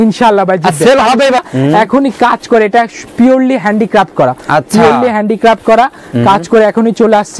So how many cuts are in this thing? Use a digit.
1